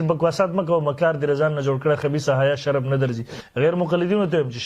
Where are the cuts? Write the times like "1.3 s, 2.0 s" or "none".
3.4 s